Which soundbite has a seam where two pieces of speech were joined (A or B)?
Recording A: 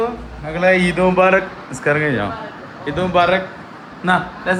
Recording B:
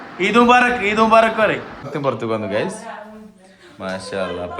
B